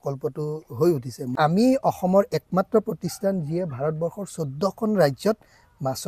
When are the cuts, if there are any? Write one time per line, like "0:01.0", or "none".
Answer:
0:01.3